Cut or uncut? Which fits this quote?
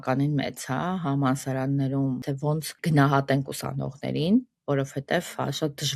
cut